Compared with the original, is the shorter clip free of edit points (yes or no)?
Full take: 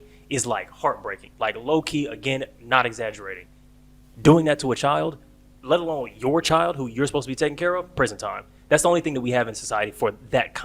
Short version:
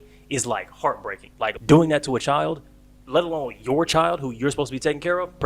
no